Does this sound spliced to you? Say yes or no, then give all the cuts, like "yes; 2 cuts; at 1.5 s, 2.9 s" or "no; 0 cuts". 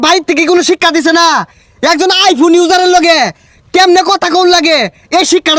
no; 0 cuts